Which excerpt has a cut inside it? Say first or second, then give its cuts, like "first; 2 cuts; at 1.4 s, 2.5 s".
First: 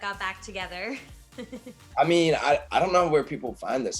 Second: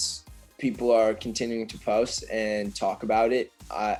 first; 2 cuts; at 1.8 s, 2.7 s